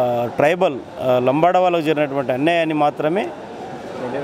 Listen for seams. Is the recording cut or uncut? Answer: uncut